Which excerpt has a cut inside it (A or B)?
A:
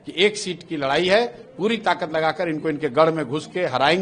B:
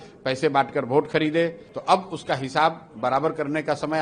B